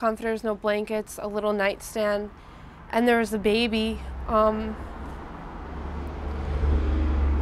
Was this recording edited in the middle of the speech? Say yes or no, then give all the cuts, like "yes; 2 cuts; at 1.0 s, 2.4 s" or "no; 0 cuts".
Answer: no; 0 cuts